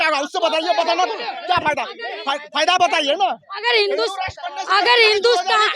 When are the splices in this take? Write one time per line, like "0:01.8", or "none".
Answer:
none